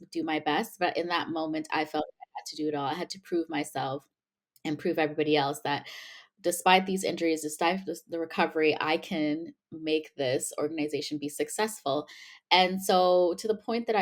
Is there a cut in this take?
no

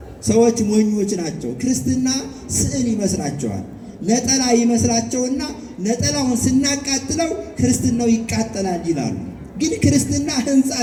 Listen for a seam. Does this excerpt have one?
no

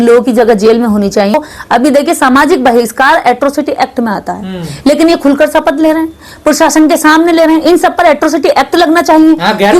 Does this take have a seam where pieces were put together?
yes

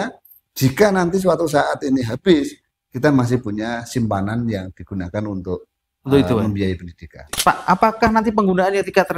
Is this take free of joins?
no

